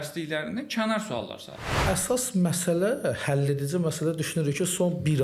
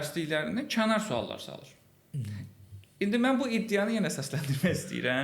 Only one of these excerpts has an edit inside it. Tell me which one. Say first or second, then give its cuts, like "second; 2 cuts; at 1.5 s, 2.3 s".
first; 1 cut; at 1.8 s